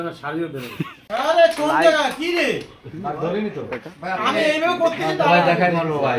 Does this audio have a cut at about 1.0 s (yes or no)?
yes